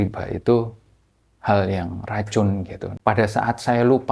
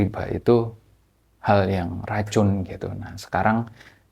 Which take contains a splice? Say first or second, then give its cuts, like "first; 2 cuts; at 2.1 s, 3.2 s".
first; 1 cut; at 2.9 s